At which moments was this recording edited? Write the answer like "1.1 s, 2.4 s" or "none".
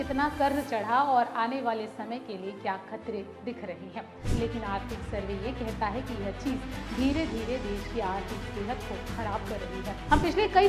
3.8 s